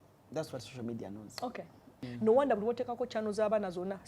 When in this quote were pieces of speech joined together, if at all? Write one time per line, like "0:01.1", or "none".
0:02.0